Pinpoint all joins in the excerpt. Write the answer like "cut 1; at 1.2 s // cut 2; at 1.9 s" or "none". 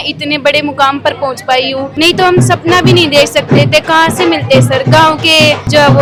none